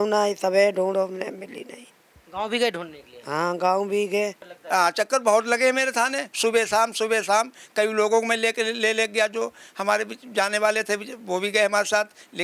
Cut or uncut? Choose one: cut